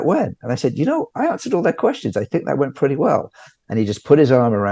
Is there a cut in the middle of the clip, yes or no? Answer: no